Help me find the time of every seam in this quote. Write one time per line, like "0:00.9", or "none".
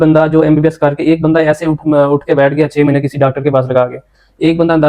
none